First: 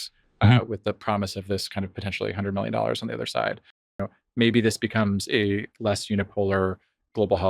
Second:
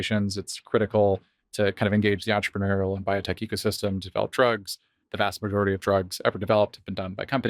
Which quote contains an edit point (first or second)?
first